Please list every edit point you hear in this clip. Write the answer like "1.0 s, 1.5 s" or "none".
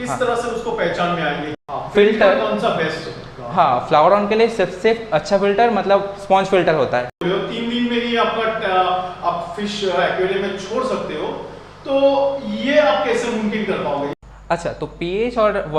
1.5 s, 7.2 s, 14.2 s